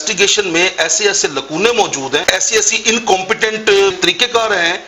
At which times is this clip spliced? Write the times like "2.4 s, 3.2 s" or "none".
2.2 s, 3.9 s

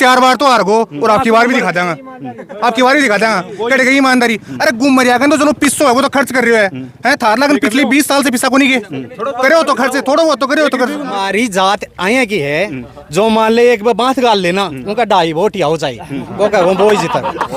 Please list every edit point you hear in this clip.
11.2 s

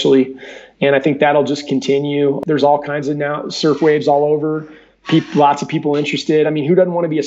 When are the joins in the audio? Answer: 2.4 s

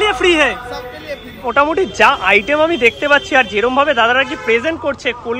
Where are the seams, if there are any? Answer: 1.5 s

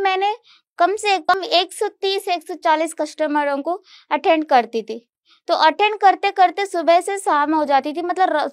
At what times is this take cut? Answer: 1.3 s

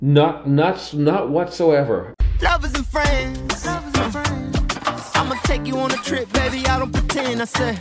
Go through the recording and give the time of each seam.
2.1 s

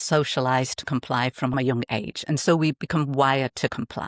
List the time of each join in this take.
1.5 s

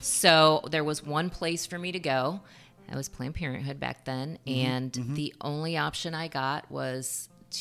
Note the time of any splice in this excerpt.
none

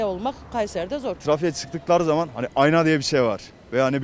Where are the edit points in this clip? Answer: 1.2 s

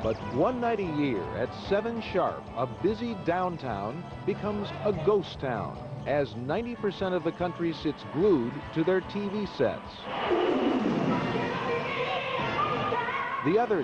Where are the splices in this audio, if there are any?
none

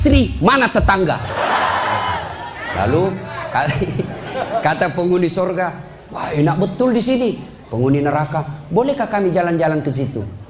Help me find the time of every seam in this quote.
1.7 s

